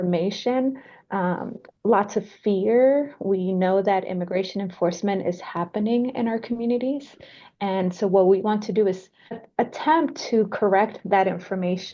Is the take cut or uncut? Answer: cut